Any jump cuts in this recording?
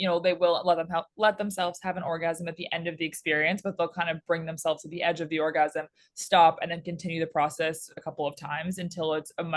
no; 0 cuts

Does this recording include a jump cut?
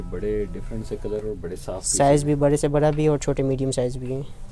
no; 0 cuts

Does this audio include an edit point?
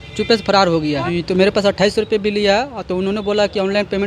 yes; 1 cut; at 1.0 s

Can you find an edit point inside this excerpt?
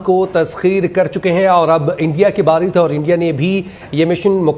no; 0 cuts

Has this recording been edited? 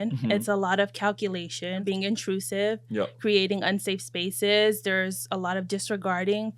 yes; 1 cut; at 1.8 s

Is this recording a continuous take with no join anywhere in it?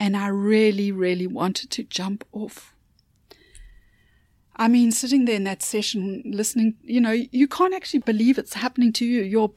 no; 1 cut; at 8.0 s

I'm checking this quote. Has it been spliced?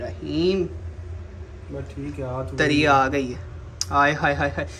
no; 0 cuts

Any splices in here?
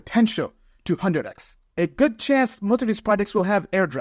yes; 1 cut; at 1.6 s

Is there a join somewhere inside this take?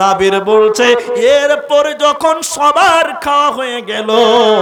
no; 0 cuts

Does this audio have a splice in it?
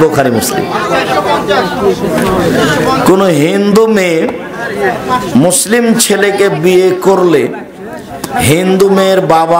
no; 0 cuts

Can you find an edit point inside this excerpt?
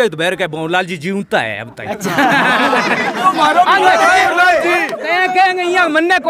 yes; 1 cut; at 4.3 s

